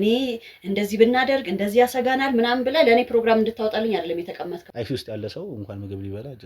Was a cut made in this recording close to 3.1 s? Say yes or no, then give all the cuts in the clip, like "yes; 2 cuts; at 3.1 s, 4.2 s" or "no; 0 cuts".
no; 1 cut; at 4.7 s